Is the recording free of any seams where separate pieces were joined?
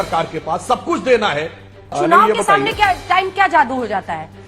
no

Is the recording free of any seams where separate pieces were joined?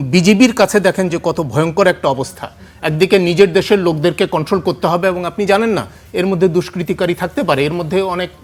yes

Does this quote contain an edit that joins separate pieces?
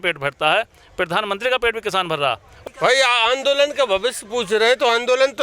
yes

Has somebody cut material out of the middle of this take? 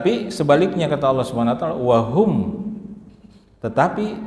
no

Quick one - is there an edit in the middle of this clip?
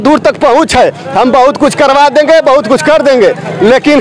no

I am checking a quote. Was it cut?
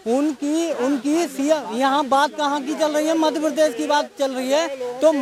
no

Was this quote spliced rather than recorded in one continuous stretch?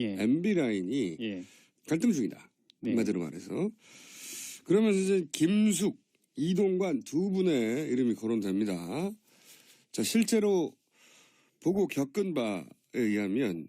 yes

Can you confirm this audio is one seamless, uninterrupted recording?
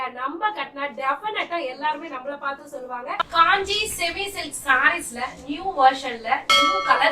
no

